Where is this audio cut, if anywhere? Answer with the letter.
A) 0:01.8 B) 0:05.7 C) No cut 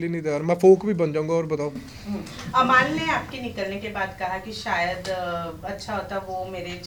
C